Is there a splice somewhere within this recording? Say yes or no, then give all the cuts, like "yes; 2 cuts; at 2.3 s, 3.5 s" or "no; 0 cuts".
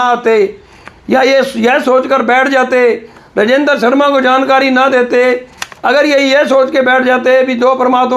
no; 0 cuts